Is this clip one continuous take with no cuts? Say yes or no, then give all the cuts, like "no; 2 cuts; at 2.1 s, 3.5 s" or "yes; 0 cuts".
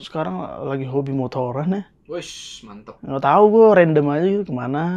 yes; 0 cuts